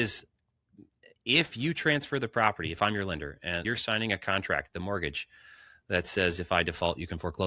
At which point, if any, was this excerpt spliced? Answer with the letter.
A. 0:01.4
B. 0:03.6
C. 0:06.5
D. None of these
B